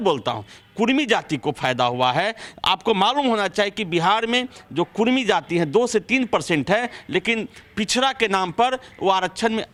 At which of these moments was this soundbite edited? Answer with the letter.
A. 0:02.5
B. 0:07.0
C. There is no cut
C